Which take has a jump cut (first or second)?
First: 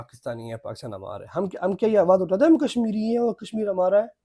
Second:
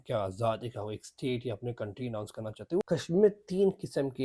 second